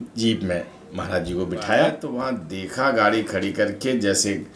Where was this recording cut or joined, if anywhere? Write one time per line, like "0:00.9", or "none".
0:02.1